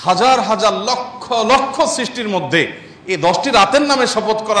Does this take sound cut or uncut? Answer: uncut